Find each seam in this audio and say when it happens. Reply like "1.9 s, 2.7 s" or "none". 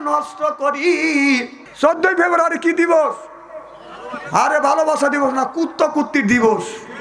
1.6 s